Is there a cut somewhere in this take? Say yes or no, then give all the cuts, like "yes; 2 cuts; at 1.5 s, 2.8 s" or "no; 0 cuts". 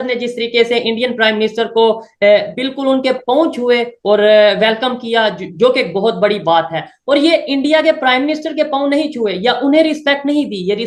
no; 0 cuts